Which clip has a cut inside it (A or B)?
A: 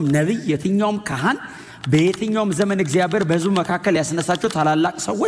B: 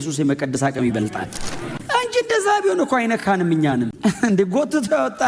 B